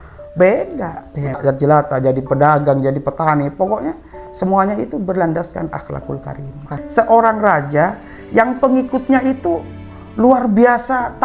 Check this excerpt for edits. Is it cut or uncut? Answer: cut